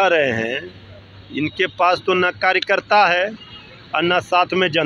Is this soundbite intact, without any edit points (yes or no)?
yes